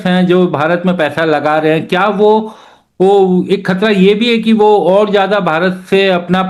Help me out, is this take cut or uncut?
uncut